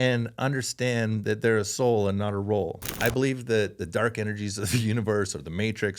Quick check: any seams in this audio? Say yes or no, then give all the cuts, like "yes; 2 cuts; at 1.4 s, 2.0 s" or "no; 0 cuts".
yes; 1 cut; at 2.8 s